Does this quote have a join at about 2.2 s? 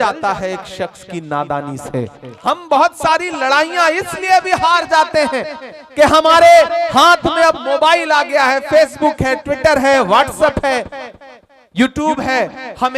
yes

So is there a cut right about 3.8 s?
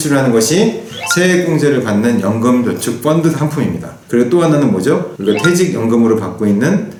no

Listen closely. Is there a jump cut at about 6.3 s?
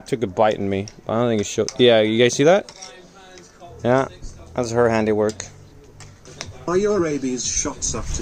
yes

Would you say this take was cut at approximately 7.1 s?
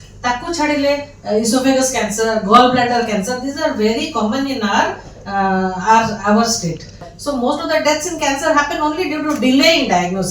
yes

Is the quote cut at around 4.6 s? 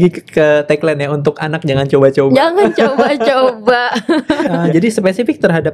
yes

